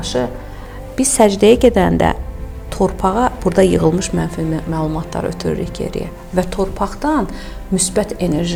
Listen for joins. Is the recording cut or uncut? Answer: uncut